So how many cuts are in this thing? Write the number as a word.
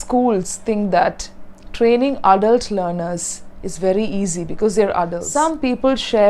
one